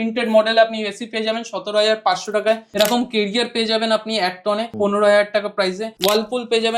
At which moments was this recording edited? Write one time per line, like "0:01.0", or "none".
0:02.7
0:04.7
0:05.9